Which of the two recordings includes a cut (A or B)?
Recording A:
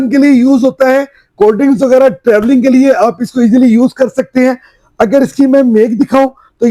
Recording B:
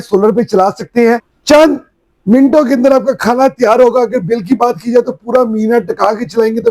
B